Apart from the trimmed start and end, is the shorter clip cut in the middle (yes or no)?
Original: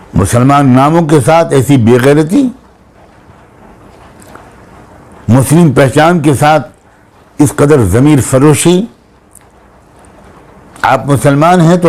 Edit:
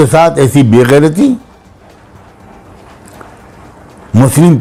no